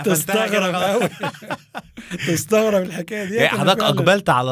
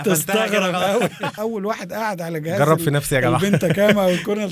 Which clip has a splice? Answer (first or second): second